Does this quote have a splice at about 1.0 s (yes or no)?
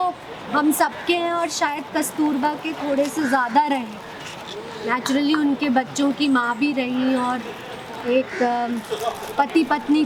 no